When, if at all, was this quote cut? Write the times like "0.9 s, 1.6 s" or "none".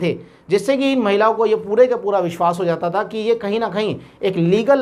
none